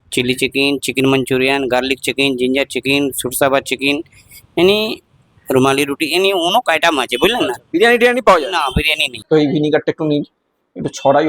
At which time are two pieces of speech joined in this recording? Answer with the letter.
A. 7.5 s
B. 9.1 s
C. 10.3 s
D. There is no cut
B